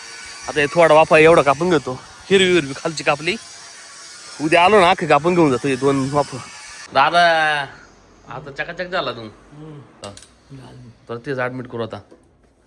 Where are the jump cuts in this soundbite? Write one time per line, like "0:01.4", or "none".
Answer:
0:06.9
0:10.0